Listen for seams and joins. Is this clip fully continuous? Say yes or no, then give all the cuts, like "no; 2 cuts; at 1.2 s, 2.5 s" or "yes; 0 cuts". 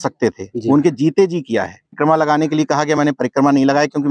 no; 1 cut; at 1.9 s